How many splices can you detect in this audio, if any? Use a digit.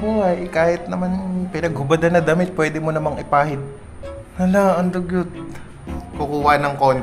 1